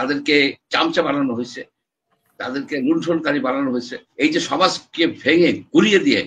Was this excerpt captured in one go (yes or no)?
no